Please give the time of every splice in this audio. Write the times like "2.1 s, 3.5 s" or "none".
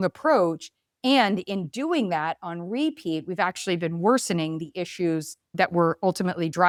none